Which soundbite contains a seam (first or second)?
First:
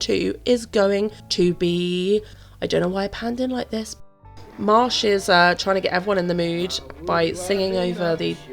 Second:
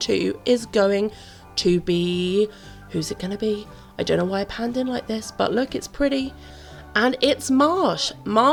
first